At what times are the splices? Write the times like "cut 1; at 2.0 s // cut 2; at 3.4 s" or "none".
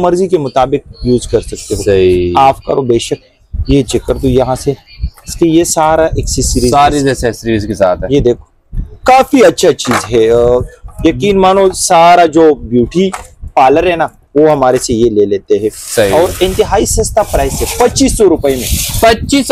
none